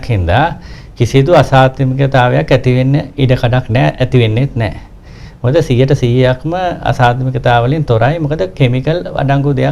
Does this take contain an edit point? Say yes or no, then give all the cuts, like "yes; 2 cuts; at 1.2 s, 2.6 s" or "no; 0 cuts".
no; 0 cuts